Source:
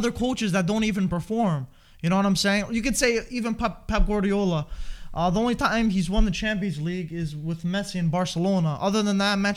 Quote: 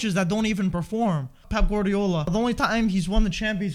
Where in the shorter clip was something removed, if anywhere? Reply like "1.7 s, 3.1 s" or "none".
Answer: 1.4 s, 2.3 s